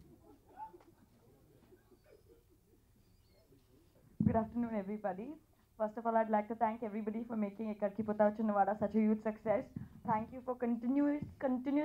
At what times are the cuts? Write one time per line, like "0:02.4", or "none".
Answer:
none